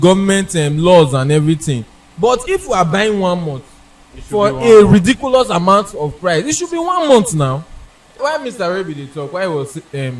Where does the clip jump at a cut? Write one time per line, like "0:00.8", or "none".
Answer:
0:08.2

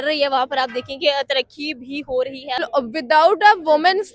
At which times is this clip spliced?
0:02.6

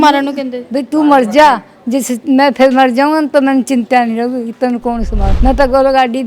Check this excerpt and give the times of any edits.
0:05.3

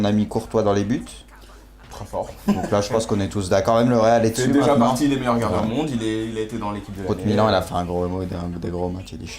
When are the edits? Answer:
0:04.5

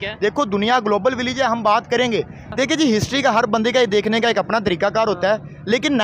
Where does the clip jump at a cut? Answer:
0:02.4

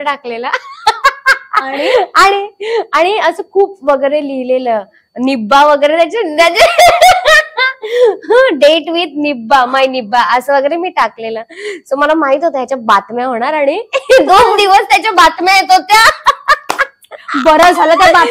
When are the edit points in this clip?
none

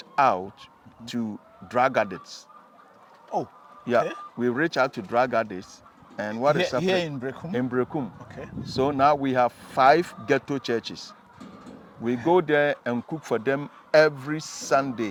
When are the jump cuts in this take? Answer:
none

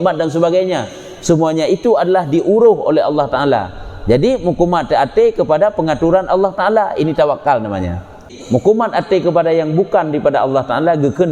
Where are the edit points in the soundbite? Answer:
0:08.3

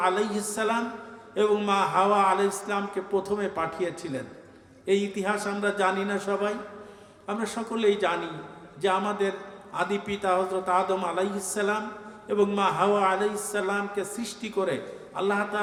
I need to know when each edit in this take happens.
none

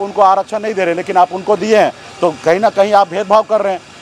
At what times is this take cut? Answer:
none

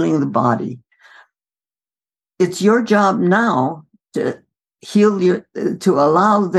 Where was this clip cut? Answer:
none

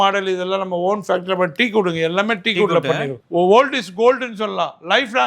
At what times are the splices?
0:03.1

